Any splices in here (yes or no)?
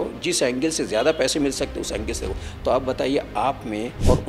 no